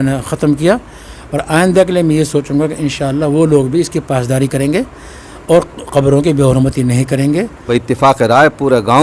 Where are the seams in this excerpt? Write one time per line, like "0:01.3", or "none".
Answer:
0:07.7